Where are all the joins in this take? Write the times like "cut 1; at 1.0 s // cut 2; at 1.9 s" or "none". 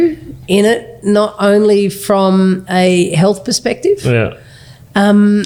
none